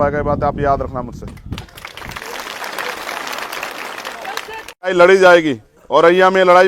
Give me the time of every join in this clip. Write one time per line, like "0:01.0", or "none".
0:04.9